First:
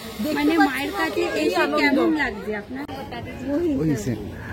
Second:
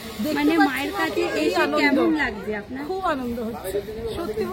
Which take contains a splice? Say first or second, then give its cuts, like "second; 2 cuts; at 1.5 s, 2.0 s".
first; 1 cut; at 2.7 s